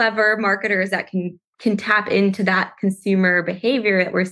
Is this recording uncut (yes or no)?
yes